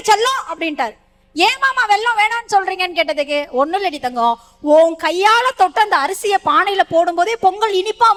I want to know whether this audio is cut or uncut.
uncut